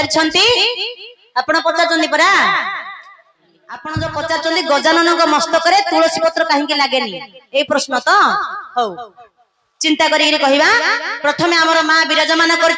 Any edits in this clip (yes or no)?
yes